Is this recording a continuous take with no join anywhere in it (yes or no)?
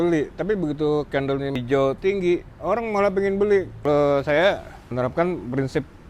no